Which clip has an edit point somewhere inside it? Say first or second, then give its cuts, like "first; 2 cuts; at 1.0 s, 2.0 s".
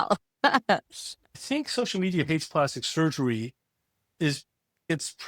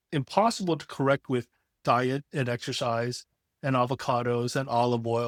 first; 1 cut; at 1.4 s